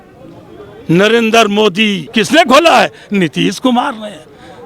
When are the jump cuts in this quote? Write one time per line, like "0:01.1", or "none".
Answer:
0:02.0